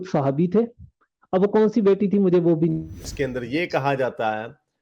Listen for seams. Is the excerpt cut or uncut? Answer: cut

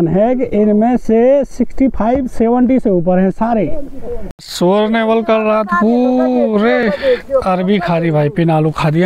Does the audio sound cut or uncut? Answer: cut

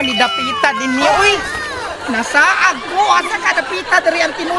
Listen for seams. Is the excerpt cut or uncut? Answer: uncut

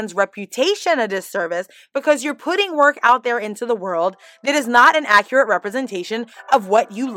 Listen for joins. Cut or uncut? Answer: uncut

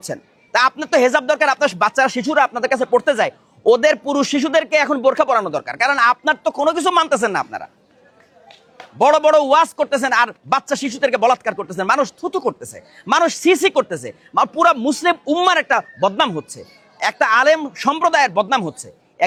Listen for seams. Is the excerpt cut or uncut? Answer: uncut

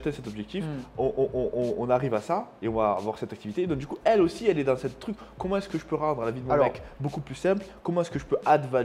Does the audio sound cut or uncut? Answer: uncut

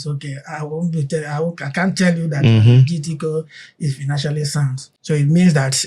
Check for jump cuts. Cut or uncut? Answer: cut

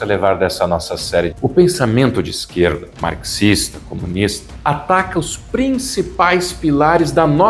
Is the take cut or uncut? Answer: cut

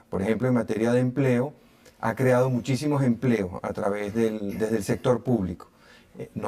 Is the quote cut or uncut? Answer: cut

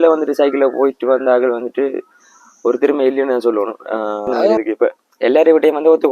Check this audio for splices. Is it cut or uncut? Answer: cut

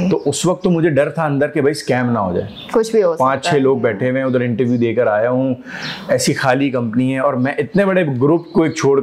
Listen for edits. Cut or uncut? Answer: uncut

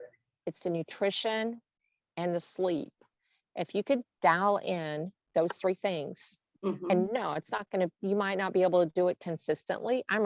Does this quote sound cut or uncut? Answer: uncut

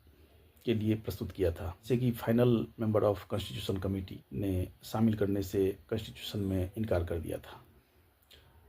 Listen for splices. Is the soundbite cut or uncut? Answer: cut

